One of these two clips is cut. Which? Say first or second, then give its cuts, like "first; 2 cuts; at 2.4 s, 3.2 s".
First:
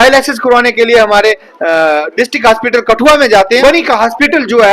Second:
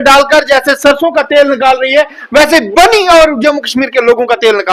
first; 1 cut; at 3.6 s